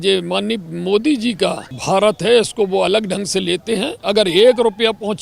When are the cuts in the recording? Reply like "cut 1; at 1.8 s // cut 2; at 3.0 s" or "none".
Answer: cut 1; at 1.7 s // cut 2; at 3.9 s